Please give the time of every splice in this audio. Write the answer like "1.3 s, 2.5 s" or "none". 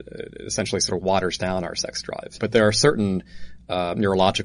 2.3 s